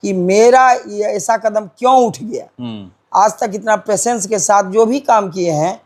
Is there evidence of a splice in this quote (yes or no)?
no